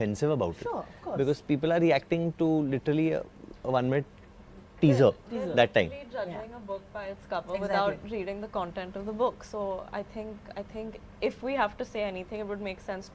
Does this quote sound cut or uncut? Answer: uncut